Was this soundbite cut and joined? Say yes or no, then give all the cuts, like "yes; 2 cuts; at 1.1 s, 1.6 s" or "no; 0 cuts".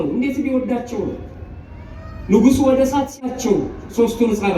yes; 1 cut; at 3.4 s